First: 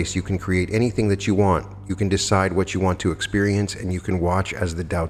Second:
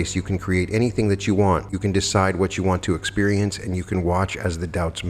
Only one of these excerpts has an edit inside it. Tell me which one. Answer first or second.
second